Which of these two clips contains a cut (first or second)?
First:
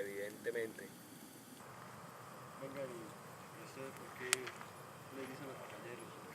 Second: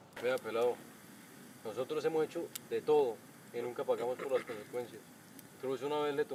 first